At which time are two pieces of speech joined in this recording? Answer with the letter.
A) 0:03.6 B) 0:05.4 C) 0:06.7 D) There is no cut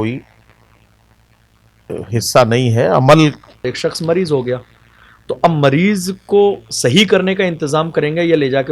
A